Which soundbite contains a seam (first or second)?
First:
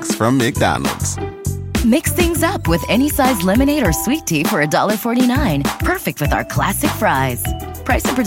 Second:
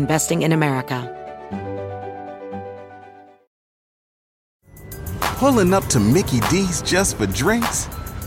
second